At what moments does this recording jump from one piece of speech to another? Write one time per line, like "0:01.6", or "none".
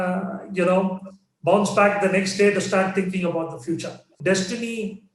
0:04.1

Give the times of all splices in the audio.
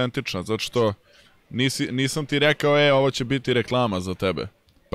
none

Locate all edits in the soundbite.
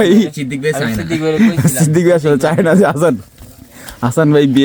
none

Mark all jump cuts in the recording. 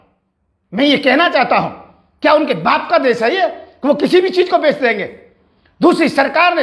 none

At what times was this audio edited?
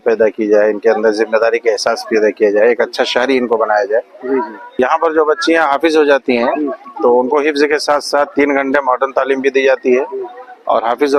0:04.8

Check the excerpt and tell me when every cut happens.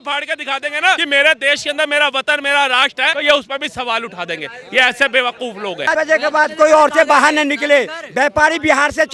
0:01.0
0:03.2
0:05.9

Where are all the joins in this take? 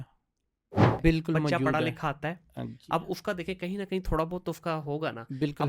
0:00.9

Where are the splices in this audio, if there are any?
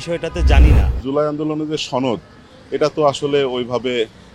0:01.0

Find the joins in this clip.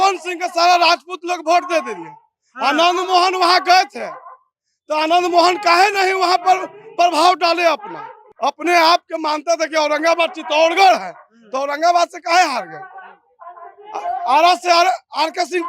0:08.2

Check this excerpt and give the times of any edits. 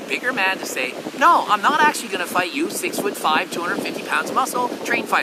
none

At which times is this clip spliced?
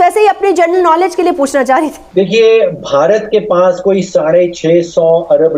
0:02.0

